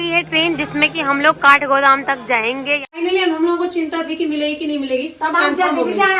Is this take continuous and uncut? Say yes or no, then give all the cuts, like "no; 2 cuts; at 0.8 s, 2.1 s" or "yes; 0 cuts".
no; 1 cut; at 2.9 s